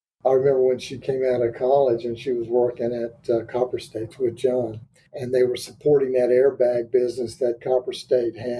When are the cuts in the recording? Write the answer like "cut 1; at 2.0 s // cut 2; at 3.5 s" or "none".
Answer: cut 1; at 1.0 s